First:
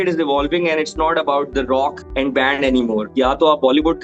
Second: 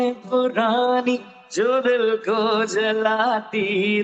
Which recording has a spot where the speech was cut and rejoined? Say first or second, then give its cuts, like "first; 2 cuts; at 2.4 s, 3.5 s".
first; 2 cuts; at 2.0 s, 3.1 s